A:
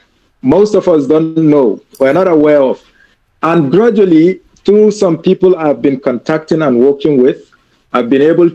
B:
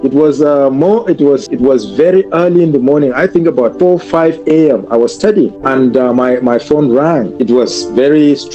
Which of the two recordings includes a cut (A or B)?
B